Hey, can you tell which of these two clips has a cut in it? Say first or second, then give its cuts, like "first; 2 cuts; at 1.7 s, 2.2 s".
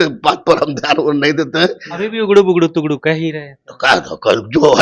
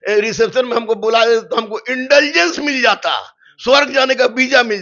first; 1 cut; at 1.8 s